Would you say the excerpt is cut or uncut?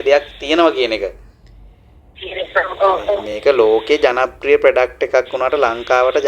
uncut